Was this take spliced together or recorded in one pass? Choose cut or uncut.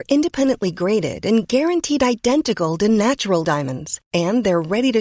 uncut